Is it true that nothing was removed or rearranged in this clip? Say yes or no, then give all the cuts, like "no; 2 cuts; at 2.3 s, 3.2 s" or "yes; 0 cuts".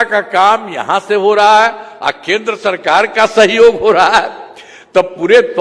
yes; 0 cuts